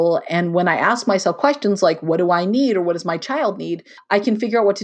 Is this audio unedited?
no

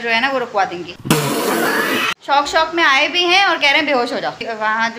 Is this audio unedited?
yes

